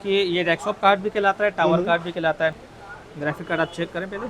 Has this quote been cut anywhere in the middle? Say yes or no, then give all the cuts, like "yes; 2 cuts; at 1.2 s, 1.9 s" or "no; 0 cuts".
yes; 1 cut; at 2.6 s